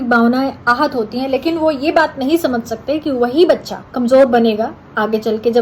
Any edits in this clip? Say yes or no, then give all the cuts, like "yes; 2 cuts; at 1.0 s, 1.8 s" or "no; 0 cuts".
yes; 1 cut; at 3.8 s